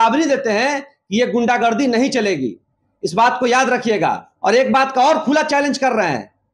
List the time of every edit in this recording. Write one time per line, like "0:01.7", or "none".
0:04.3